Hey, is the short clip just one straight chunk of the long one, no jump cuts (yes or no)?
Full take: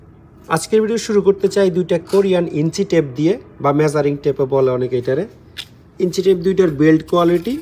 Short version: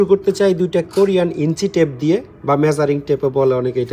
yes